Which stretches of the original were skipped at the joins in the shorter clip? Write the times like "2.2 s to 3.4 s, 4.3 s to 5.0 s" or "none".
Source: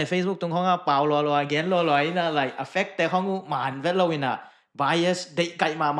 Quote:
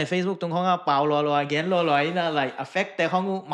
none